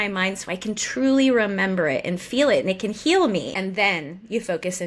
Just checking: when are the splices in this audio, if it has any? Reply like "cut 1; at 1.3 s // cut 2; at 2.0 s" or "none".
cut 1; at 3.6 s